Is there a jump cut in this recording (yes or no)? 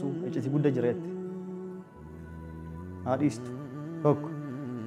yes